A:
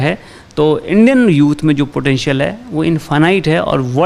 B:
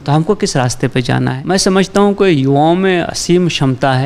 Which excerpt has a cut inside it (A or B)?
B